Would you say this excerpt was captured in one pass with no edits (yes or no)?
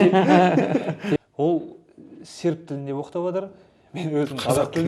no